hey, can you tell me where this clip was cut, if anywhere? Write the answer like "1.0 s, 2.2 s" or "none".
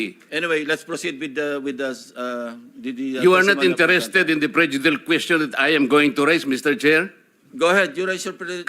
none